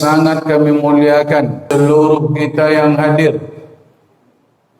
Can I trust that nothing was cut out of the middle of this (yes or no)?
no